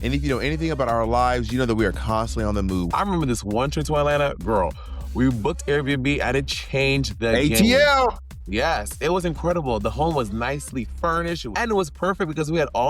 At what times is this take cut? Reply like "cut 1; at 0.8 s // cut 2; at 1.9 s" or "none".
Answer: cut 1; at 2.9 s // cut 2; at 11.5 s

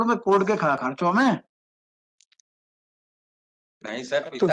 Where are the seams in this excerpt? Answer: none

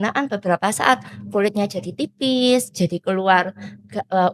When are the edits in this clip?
none

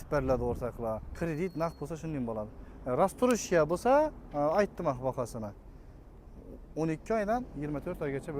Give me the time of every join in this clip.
cut 1; at 1.1 s

